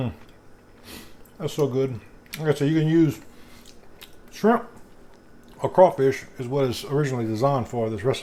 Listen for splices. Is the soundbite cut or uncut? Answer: uncut